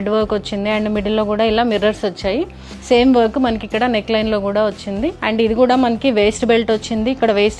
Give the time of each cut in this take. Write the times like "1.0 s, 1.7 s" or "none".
2.7 s, 5.2 s